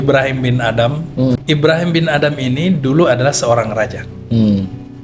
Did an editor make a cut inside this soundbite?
yes; 1 cut; at 1.3 s

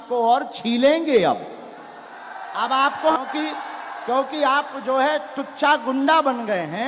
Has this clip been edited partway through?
yes; 1 cut; at 3.2 s

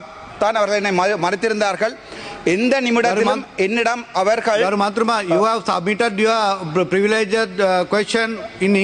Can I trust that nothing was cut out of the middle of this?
yes; 0 cuts

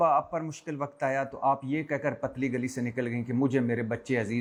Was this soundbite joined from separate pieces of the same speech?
no; 0 cuts

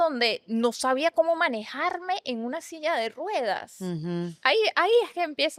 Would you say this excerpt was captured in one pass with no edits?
yes; 0 cuts

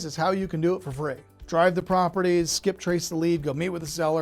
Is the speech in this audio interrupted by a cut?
no; 0 cuts

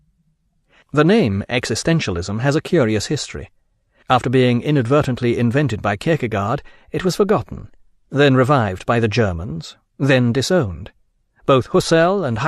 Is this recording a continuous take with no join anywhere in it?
no; 1 cut; at 11.2 s

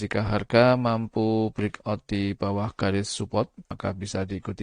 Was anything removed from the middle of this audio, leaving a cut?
yes; 1 cut; at 3.7 s

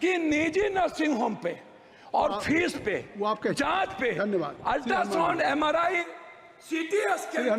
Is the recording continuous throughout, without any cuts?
yes; 0 cuts

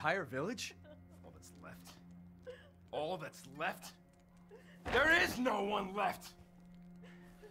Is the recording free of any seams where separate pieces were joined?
yes; 0 cuts

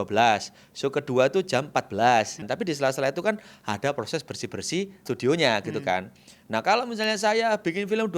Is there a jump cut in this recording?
yes; 2 cuts; at 2.4 s, 5.1 s

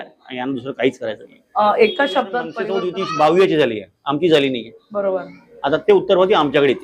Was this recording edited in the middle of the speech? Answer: yes; 1 cut; at 2.5 s

